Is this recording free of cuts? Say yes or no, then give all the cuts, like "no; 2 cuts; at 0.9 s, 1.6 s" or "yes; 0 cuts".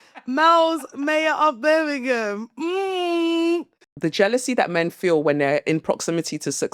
no; 1 cut; at 3.8 s